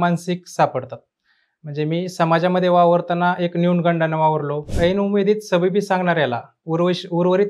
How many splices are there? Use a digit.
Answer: 1